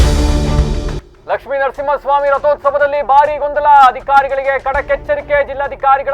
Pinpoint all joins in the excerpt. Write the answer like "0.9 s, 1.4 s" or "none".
1.0 s